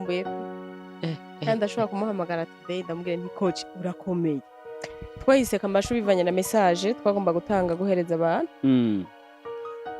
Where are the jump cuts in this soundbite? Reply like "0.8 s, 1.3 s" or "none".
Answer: 4.5 s